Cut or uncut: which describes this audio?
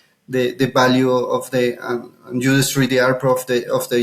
uncut